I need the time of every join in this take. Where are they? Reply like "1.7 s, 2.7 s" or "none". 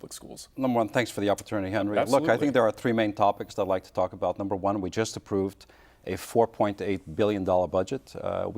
2.0 s

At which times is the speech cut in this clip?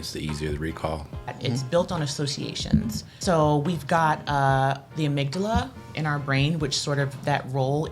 1.3 s, 3.2 s

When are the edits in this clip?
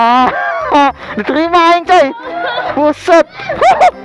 none

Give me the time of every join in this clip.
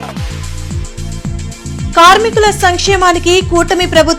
none

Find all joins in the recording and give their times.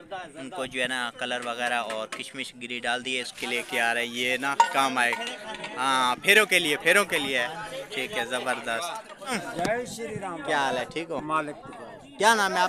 3.3 s, 9.4 s

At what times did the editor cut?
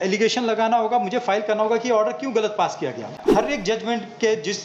3.2 s

